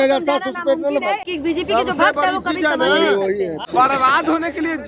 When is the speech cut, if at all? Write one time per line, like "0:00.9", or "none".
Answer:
0:01.2
0:03.6